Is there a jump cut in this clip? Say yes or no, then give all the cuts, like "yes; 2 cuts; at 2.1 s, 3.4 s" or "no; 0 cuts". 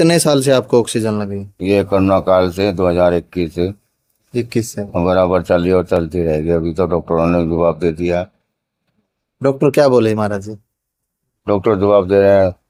no; 0 cuts